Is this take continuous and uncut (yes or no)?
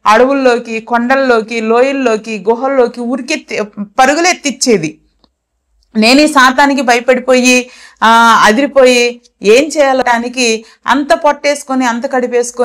no